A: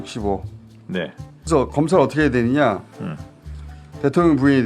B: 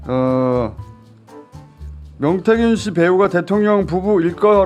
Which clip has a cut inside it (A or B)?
A